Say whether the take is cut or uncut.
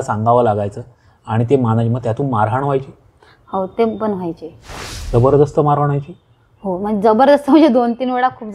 uncut